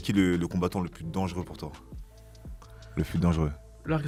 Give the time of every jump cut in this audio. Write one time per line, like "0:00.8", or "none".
none

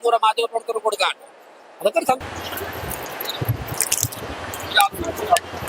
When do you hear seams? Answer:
0:02.2

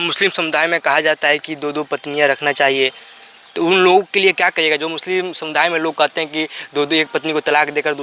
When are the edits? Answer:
none

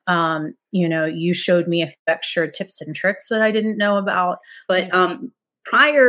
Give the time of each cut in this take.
0:04.5

